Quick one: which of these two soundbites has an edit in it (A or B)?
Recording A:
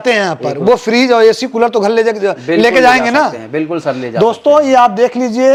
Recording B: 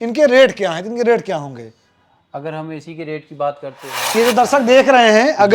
B